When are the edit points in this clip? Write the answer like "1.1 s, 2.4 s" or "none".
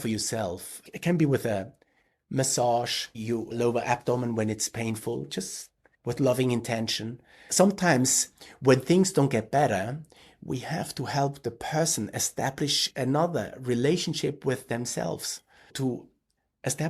7.5 s